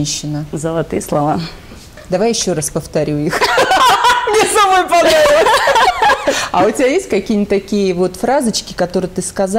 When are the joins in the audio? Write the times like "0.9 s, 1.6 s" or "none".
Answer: none